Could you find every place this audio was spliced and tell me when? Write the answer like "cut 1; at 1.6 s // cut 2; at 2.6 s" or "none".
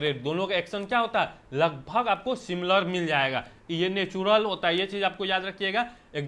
none